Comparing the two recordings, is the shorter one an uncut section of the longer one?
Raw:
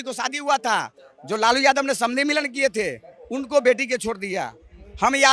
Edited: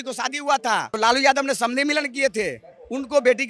no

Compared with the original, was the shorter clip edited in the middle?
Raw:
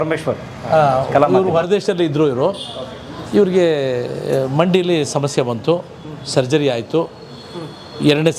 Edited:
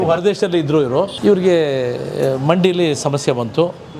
yes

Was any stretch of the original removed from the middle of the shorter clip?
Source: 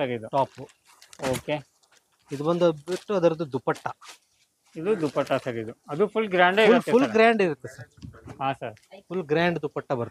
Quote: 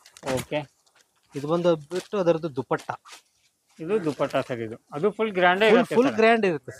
no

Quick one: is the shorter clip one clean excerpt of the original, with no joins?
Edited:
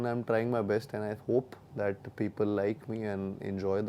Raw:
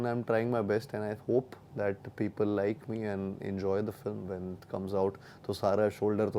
yes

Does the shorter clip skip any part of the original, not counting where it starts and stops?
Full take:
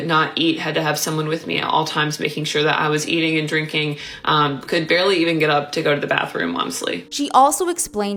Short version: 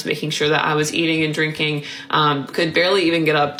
no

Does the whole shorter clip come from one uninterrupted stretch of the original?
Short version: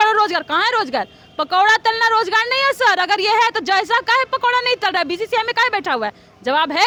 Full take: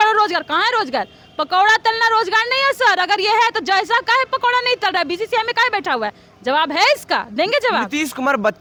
yes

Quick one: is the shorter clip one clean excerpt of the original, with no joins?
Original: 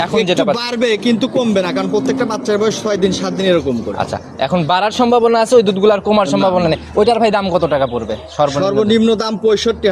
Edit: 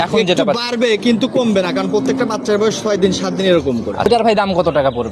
no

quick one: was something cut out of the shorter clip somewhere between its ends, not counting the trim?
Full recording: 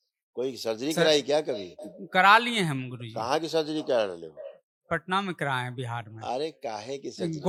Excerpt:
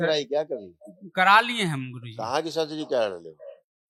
no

